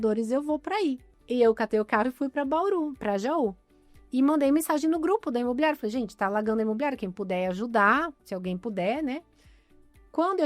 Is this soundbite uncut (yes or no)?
no